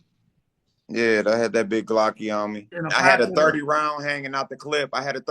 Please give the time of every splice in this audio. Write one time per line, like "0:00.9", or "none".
0:02.7